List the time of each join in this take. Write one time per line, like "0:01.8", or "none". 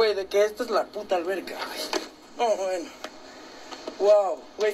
none